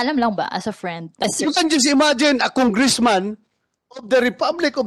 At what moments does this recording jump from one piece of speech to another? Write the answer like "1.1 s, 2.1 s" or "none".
1.2 s